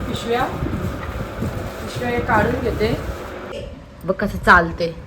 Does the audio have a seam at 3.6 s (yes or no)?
yes